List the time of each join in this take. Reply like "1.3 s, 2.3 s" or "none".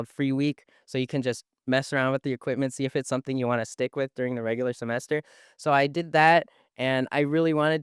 none

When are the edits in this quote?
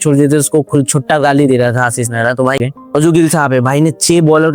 2.6 s

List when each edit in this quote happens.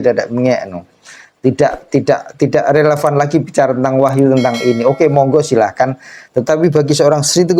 none

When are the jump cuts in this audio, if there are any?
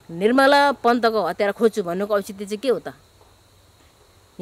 none

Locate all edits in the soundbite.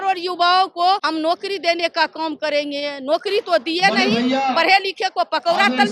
1.0 s

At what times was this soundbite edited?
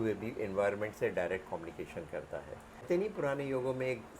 2.8 s

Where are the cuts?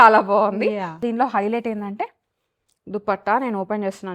1.0 s

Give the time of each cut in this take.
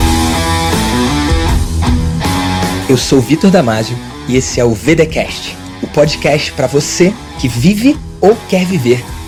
none

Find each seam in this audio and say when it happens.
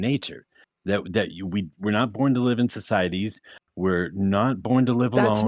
none

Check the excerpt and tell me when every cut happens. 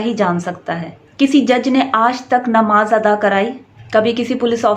1.0 s, 3.7 s

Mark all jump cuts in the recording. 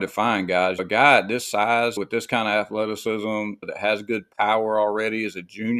0.8 s, 2.0 s, 3.7 s

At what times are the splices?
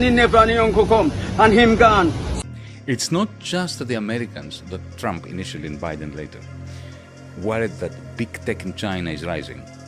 2.4 s

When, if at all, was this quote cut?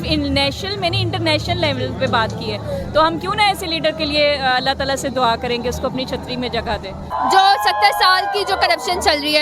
7.1 s

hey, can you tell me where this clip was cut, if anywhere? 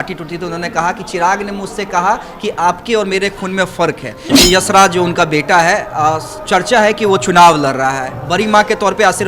4.3 s

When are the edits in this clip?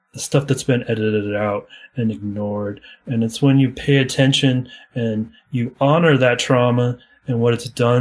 7.1 s

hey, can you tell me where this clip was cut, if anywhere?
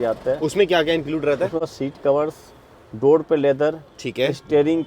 1.7 s

